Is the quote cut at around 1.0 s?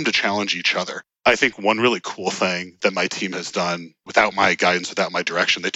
yes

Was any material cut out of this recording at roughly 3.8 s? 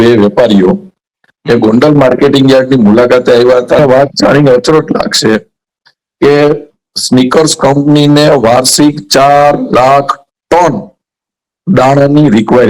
yes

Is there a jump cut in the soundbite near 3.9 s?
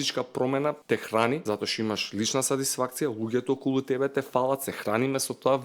no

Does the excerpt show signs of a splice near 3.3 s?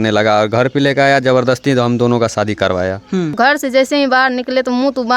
yes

